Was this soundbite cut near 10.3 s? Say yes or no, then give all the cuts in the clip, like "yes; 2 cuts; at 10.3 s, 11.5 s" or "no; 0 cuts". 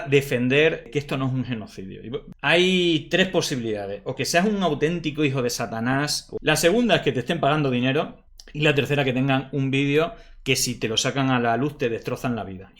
no; 2 cuts; at 2.3 s, 6.2 s